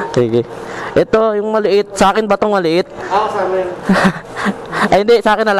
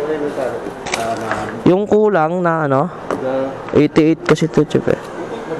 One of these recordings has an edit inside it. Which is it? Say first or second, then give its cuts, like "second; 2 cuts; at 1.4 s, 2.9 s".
first; 1 cut; at 3.1 s